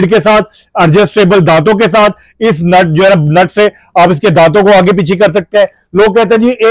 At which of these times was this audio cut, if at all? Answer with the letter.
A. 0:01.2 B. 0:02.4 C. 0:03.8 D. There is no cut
D